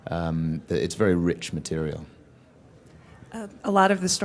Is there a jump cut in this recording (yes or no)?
no